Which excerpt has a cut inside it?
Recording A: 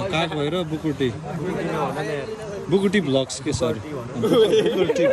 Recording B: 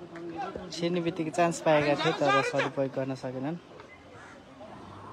B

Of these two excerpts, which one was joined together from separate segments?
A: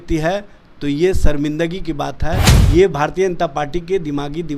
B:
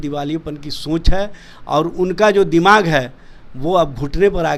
A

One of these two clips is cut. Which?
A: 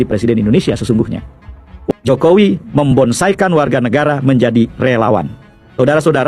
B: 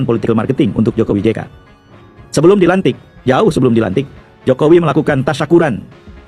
A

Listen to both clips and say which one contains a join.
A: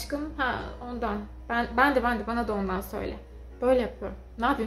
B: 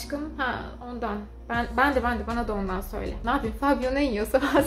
B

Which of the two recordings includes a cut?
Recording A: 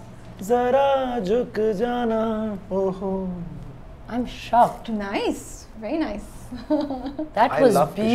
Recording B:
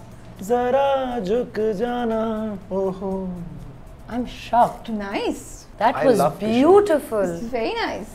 B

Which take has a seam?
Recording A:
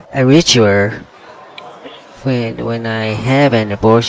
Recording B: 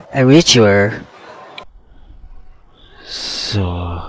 B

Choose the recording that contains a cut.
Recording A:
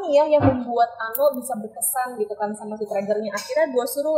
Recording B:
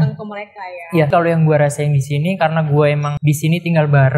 B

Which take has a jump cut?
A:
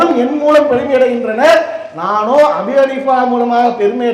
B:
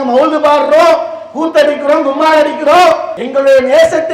B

